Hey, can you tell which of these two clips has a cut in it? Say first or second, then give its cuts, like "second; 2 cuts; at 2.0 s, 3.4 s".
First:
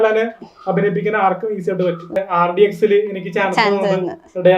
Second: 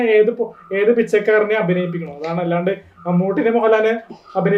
first; 1 cut; at 2.2 s